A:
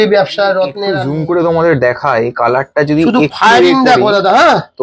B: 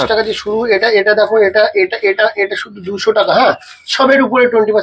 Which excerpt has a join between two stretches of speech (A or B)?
A